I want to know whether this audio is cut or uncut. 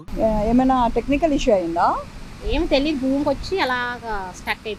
uncut